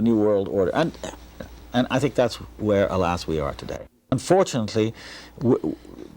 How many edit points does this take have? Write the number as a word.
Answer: one